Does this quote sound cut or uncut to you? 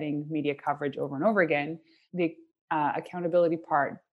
cut